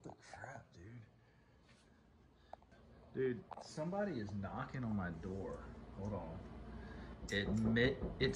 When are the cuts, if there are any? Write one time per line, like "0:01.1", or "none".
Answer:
none